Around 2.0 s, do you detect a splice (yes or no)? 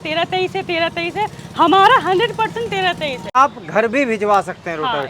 no